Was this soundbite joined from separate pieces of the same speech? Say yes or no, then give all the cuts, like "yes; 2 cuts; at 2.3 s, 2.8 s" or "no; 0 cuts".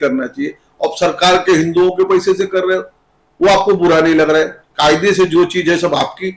yes; 1 cut; at 4.6 s